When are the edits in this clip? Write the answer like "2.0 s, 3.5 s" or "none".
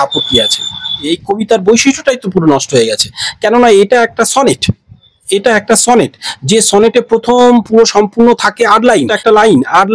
1.1 s, 9.1 s